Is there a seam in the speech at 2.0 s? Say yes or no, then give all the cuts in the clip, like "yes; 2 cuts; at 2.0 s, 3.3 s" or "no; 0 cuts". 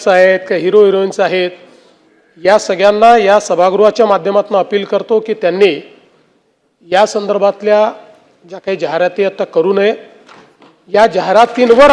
no; 0 cuts